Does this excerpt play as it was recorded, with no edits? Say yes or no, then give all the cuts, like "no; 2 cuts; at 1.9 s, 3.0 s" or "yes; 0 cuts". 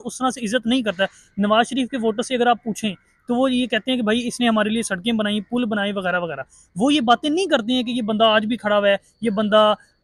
yes; 0 cuts